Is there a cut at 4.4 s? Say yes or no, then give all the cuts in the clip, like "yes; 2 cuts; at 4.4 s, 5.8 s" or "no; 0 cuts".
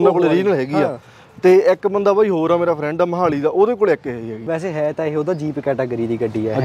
yes; 1 cut; at 4.4 s